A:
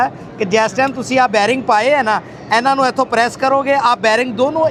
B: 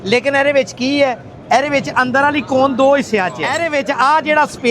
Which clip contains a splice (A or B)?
B